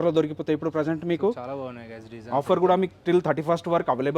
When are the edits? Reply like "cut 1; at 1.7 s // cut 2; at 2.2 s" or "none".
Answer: none